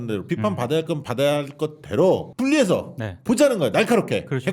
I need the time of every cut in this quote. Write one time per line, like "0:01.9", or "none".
0:01.0
0:02.3